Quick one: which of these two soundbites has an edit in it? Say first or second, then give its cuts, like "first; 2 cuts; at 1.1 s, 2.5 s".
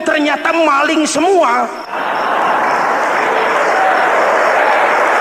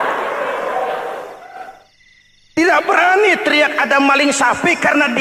first; 1 cut; at 1.8 s